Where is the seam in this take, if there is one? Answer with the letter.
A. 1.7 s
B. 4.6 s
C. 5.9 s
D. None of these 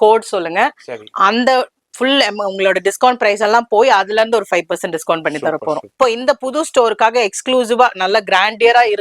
C